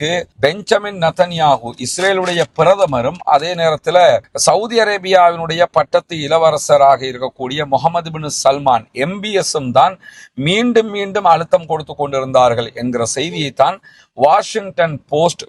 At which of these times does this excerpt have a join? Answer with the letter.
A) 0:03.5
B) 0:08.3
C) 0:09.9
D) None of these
D